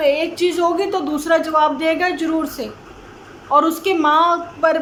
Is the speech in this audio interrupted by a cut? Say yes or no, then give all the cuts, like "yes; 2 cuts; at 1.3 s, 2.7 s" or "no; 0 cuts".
no; 0 cuts